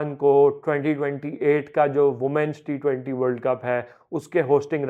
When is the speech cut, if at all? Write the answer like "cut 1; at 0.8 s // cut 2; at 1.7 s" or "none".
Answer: none